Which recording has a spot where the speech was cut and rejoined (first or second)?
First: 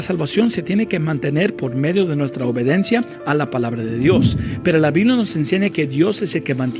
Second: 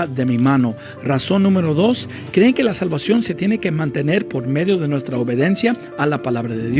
second